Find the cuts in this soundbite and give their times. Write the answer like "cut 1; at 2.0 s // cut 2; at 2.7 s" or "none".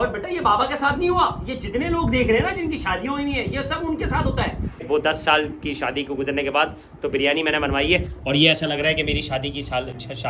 cut 1; at 4.8 s